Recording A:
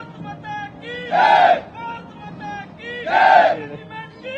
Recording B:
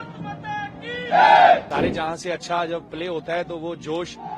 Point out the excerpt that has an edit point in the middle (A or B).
B